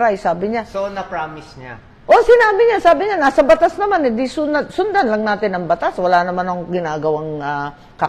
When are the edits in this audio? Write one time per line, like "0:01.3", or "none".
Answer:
none